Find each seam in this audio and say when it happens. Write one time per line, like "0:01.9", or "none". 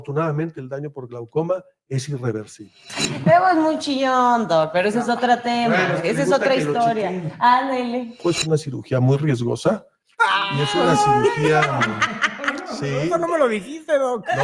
0:02.8
0:08.2